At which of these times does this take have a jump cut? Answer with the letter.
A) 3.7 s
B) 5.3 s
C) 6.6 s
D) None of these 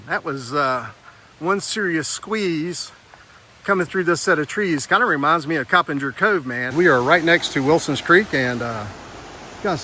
C